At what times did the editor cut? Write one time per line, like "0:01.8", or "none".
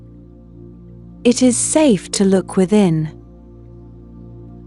0:01.2
0:03.8